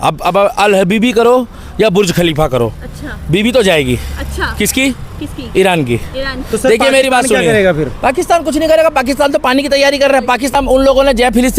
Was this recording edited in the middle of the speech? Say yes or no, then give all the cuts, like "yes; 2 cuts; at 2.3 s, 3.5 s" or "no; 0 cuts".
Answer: yes; 1 cut; at 10.5 s